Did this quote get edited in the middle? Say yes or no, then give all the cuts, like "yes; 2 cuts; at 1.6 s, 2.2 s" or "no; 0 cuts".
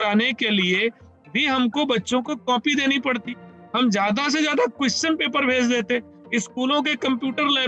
no; 0 cuts